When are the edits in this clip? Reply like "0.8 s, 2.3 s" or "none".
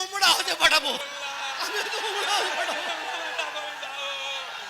1.0 s